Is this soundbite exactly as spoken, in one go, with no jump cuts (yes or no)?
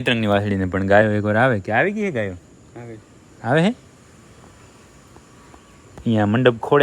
yes